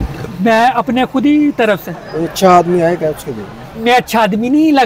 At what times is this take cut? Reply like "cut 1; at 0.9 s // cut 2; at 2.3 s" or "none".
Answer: cut 1; at 2.0 s // cut 2; at 3.7 s